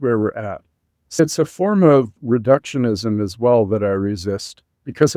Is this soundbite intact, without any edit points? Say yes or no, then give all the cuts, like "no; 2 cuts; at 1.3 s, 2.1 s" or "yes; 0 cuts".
no; 1 cut; at 1.2 s